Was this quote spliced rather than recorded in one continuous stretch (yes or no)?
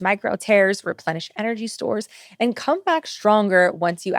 no